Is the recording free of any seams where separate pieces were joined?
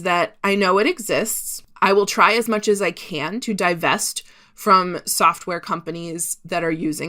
yes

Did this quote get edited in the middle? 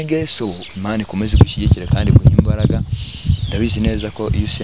no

